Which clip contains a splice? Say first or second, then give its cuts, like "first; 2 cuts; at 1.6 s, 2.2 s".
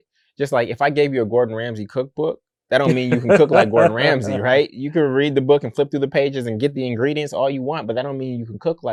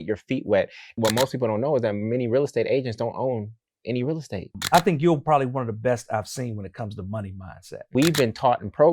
second; 3 cuts; at 0.9 s, 4.5 s, 7.9 s